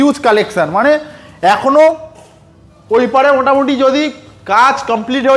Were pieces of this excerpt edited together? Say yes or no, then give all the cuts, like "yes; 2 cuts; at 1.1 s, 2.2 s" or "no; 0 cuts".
no; 0 cuts